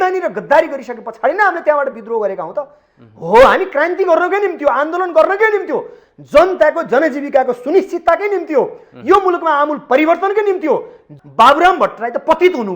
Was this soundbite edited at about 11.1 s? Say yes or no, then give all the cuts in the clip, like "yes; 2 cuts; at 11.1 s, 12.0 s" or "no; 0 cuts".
yes; 1 cut; at 11.1 s